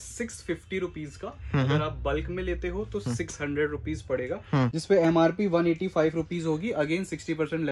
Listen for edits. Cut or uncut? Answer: cut